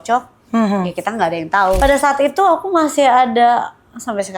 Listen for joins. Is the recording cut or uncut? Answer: cut